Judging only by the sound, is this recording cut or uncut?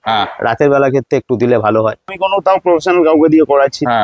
cut